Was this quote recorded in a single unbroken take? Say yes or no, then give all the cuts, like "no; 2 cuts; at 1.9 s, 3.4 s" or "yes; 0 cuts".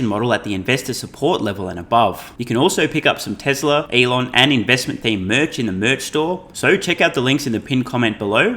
no; 3 cuts; at 2.3 s, 3.9 s, 6.5 s